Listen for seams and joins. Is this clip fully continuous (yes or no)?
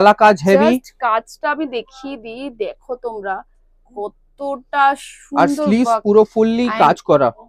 yes